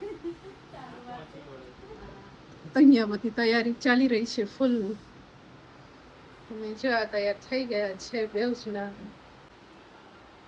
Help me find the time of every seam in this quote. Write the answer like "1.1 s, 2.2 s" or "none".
9.5 s